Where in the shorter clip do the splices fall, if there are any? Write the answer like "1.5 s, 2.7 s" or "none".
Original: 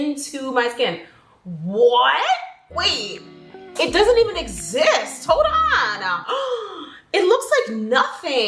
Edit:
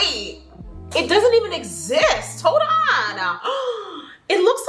none